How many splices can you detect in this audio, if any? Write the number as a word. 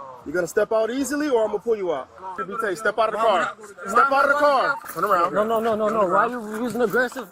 two